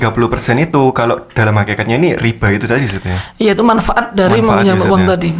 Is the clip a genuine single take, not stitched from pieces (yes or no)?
yes